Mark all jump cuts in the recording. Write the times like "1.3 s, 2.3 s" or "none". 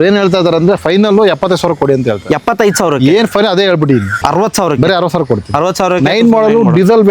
4.1 s